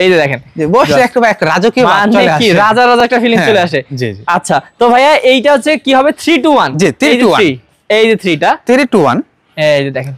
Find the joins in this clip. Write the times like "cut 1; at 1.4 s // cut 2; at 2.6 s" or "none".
none